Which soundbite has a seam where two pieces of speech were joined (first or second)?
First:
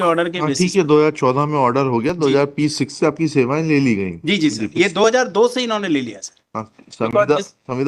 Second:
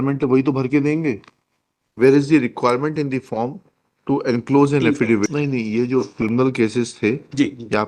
second